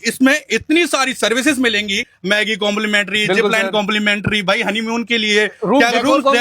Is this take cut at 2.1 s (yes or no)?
yes